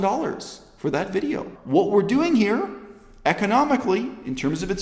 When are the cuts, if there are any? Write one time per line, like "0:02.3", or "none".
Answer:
0:01.5